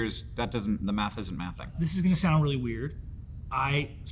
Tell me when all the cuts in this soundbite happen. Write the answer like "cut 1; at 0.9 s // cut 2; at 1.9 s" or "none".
cut 1; at 1.7 s